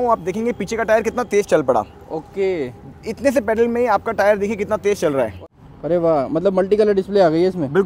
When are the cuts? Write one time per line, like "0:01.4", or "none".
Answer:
0:05.4